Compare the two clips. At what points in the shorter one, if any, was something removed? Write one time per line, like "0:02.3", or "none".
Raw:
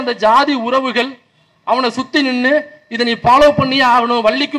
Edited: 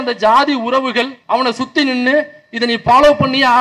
0:01.2